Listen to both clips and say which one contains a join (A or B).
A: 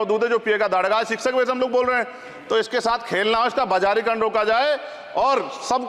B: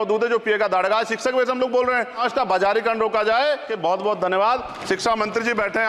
B